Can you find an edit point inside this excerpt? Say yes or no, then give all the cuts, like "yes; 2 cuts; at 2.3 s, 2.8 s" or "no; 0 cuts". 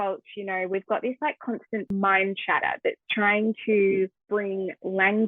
yes; 2 cuts; at 1.9 s, 4.2 s